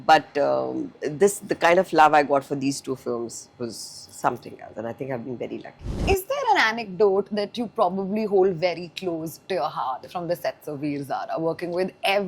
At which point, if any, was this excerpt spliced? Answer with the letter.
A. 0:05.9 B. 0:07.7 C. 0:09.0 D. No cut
A